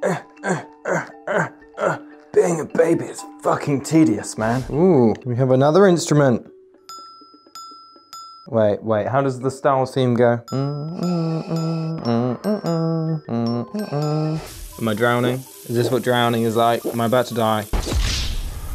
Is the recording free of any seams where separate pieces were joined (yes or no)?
no